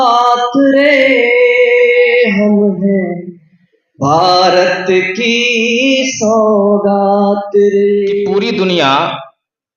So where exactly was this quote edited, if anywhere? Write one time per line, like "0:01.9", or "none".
0:08.3